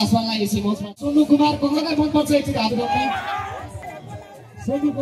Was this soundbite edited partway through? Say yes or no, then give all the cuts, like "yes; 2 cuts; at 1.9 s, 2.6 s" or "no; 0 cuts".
yes; 2 cuts; at 0.9 s, 3.9 s